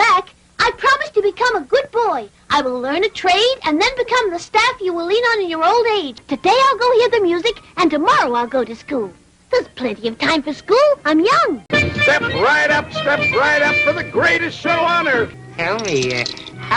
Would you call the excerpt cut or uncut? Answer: cut